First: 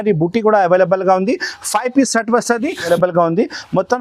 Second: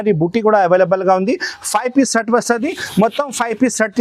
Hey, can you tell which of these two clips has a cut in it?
first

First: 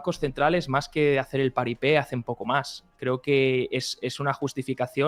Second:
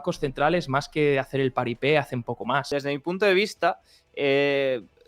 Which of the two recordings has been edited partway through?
second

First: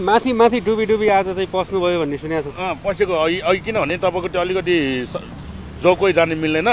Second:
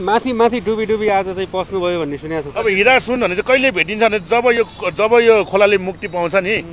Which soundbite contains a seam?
second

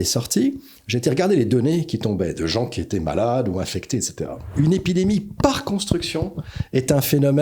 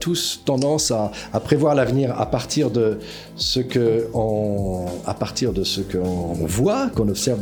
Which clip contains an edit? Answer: first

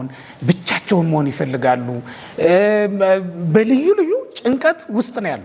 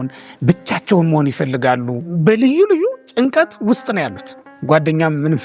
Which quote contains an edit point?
second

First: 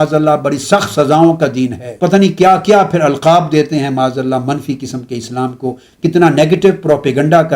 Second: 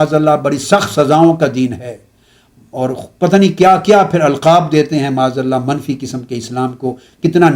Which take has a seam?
first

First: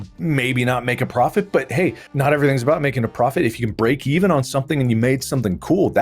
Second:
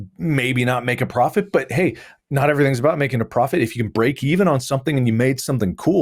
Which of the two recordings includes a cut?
first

